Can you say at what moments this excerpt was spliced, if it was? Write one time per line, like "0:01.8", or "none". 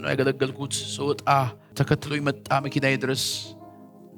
0:01.6